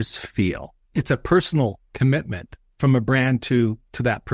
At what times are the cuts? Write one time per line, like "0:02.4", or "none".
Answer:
0:01.0

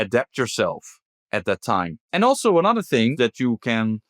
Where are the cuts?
0:02.0
0:03.1

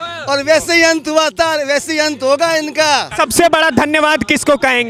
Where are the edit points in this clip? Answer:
0:03.1

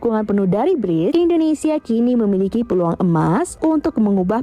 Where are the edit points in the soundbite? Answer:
0:01.1
0:03.5

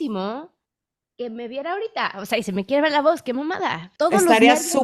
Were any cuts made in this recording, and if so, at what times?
0:03.8

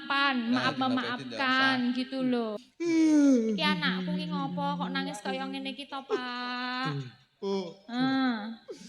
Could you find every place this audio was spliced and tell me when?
0:02.6

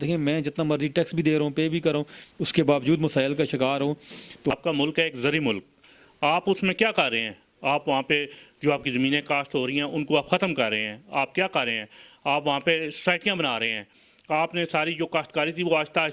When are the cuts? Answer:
0:04.5

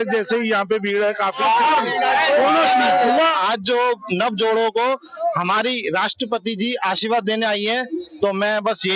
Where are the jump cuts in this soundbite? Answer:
0:01.4
0:03.4

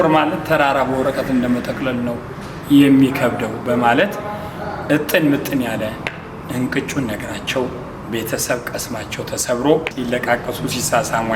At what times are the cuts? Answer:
0:09.9

